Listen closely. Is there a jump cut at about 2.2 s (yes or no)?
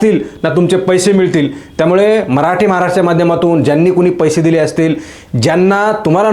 no